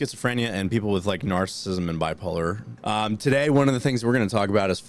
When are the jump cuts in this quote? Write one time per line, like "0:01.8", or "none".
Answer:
0:02.7